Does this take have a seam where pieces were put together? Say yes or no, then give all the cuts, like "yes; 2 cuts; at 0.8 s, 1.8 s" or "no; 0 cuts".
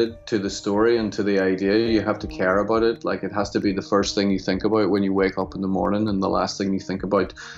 no; 0 cuts